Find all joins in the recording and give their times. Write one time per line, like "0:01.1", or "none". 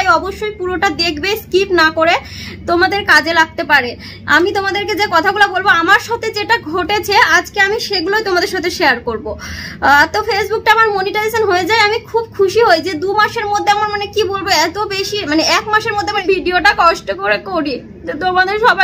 0:16.2

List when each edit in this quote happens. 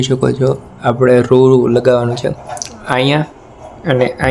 none

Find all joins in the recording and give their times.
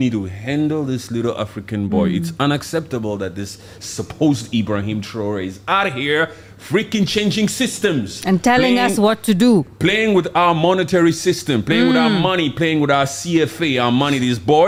none

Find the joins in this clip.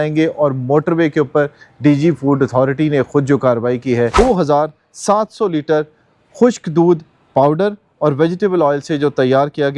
0:04.1

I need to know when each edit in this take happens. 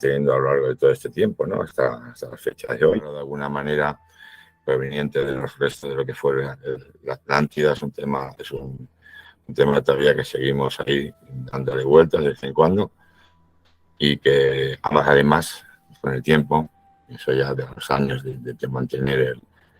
0:03.3

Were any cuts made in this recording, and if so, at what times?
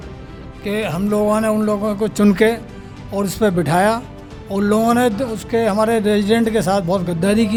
none

